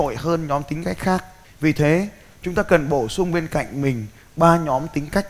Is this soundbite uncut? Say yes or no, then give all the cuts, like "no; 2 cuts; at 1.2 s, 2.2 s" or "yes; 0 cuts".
no; 1 cut; at 1.4 s